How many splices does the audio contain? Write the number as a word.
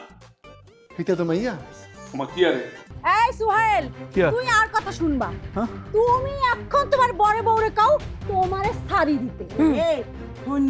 one